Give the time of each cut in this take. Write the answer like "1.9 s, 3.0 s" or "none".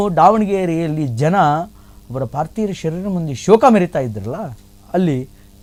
none